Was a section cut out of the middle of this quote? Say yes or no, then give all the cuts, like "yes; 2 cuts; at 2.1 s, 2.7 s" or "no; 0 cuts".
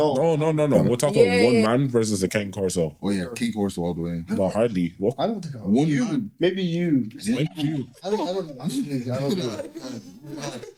no; 0 cuts